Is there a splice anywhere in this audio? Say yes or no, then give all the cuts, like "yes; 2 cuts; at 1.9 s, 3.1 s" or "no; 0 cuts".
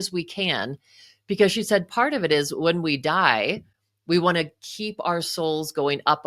no; 0 cuts